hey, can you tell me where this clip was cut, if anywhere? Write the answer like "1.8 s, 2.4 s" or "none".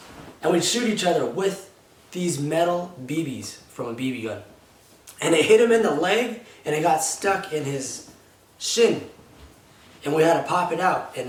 none